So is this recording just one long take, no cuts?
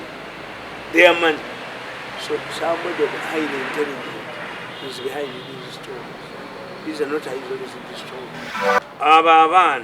no; 1 cut; at 8.5 s

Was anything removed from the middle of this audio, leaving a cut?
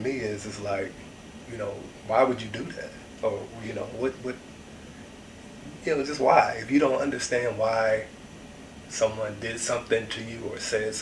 no; 0 cuts

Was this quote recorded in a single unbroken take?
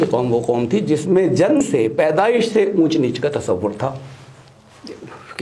no; 1 cut; at 1.6 s

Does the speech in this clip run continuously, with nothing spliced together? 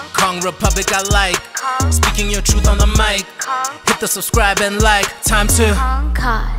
yes; 0 cuts

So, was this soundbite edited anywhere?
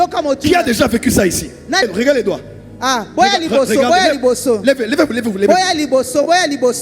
yes; 1 cut; at 1.8 s

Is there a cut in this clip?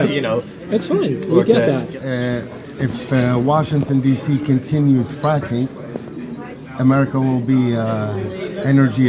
no; 0 cuts

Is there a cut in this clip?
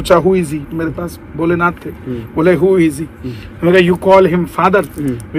no; 0 cuts

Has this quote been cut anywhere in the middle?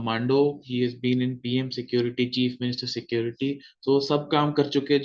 no; 0 cuts

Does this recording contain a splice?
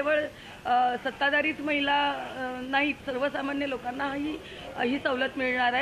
no; 0 cuts

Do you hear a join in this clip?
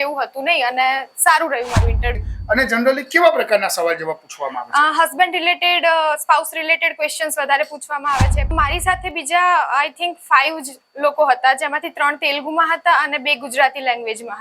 yes; 2 cuts; at 2.2 s, 8.5 s

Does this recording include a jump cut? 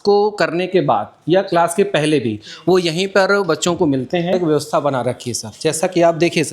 yes; 1 cut; at 4.3 s

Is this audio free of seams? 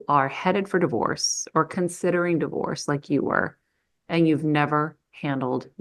yes; 0 cuts

